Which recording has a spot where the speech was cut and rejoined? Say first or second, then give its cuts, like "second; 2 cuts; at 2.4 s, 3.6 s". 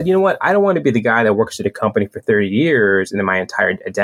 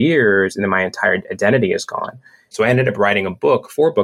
second; 1 cut; at 2.5 s